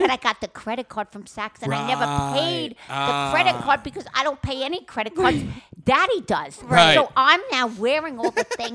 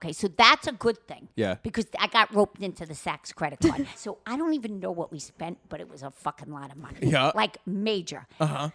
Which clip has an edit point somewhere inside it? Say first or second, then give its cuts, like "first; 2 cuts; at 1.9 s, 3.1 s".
second; 1 cut; at 4.0 s